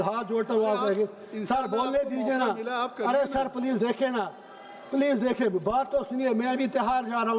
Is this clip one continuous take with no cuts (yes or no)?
yes